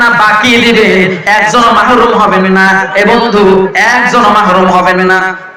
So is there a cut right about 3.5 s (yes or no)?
no